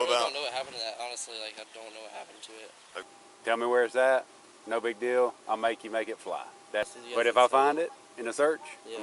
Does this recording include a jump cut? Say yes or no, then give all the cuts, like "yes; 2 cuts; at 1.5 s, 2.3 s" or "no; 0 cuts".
yes; 2 cuts; at 2.9 s, 6.9 s